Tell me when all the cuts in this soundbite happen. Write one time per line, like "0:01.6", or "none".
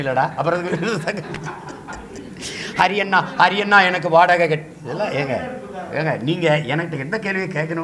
none